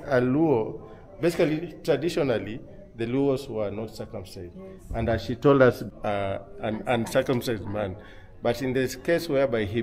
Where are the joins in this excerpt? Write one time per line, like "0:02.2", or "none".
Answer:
0:05.8